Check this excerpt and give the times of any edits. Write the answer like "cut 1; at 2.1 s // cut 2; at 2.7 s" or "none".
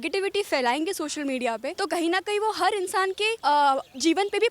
cut 1; at 1.7 s // cut 2; at 3.4 s